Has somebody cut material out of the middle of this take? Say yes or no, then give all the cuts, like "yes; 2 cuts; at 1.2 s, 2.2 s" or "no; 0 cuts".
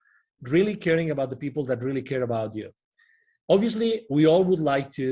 no; 0 cuts